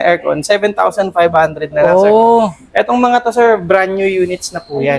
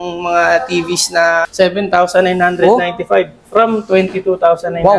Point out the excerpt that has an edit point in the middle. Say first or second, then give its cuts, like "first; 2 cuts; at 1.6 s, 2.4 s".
second; 1 cut; at 1.4 s